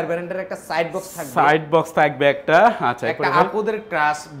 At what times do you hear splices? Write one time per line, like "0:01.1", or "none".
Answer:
none